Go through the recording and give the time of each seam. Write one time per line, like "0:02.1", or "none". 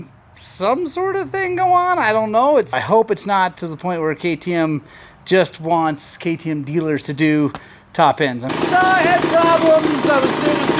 0:02.7
0:08.5